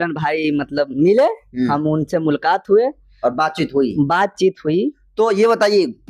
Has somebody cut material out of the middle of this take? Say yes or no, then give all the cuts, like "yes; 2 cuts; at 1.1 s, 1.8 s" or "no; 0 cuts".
no; 0 cuts